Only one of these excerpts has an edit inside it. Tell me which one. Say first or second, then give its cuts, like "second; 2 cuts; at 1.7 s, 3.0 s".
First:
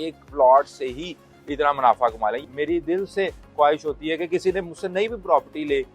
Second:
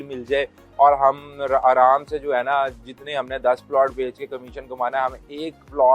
first; 1 cut; at 2.4 s